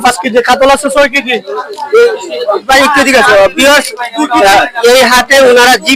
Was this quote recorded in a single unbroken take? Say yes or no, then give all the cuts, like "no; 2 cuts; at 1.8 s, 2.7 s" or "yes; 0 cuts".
yes; 0 cuts